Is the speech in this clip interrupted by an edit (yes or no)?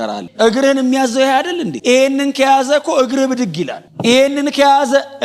no